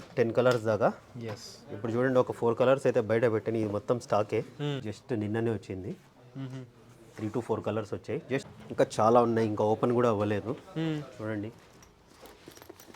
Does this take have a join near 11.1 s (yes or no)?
no